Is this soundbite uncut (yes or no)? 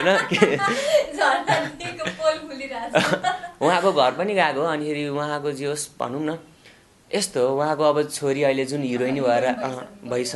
yes